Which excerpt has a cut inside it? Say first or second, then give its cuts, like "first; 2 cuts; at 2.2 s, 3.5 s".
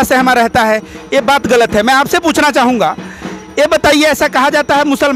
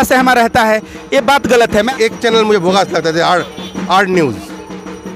second; 1 cut; at 1.9 s